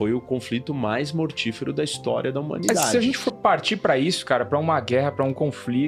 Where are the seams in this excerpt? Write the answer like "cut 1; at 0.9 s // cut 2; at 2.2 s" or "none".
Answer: cut 1; at 2.9 s